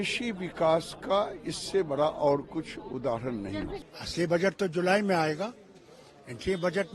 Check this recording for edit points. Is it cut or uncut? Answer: cut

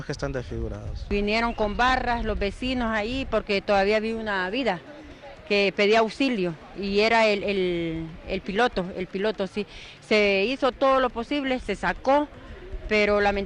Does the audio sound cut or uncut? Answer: uncut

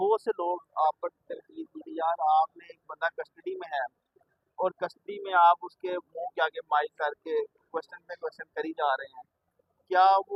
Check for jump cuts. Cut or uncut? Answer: uncut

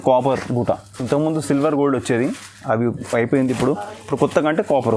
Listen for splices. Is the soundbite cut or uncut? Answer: uncut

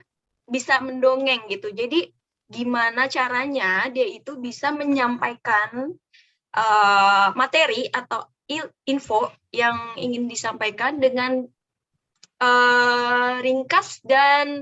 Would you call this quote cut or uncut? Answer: uncut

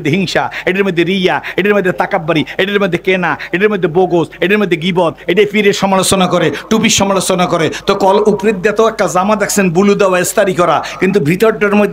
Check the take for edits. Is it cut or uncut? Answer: uncut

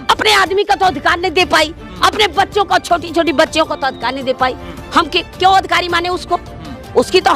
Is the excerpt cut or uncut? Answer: cut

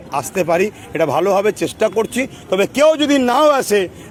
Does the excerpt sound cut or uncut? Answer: uncut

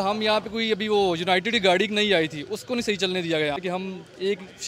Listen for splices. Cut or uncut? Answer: cut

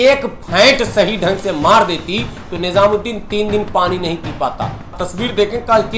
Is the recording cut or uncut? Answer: cut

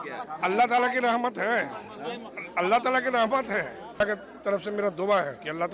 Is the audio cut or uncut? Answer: cut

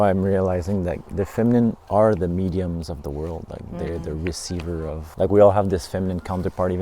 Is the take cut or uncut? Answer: cut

